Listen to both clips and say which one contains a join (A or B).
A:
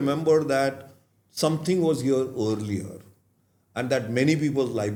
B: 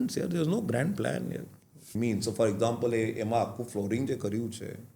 B